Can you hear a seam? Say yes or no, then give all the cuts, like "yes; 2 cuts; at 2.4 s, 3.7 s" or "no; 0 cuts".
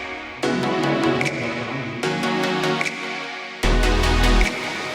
no; 0 cuts